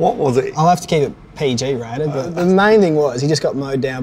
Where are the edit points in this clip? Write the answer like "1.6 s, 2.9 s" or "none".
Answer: 2.3 s